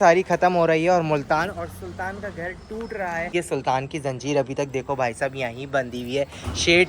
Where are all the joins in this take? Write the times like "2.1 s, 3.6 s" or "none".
3.3 s